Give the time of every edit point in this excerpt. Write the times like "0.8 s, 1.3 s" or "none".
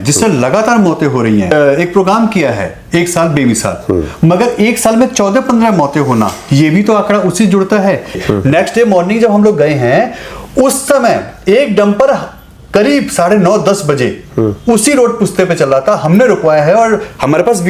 1.5 s, 8.2 s

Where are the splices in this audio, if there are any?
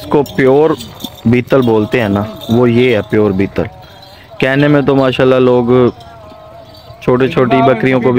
none

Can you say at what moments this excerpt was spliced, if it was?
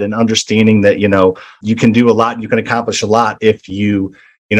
none

